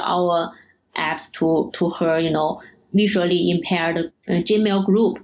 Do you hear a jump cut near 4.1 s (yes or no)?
yes